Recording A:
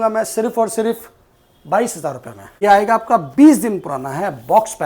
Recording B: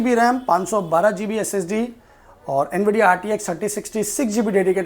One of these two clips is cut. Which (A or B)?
A